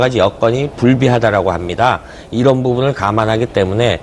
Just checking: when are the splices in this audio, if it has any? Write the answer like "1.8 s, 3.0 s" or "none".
2.4 s